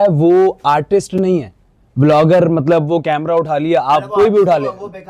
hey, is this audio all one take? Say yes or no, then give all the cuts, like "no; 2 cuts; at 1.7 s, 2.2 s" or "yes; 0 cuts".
yes; 0 cuts